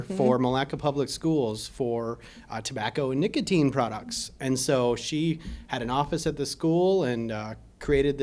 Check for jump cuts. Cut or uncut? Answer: uncut